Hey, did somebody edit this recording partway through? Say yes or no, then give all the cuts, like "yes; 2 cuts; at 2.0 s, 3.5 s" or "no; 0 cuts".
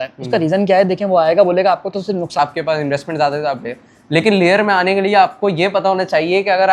yes; 1 cut; at 2.4 s